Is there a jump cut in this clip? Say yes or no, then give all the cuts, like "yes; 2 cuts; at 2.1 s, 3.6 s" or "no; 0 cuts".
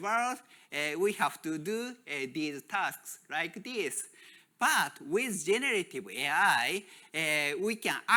no; 0 cuts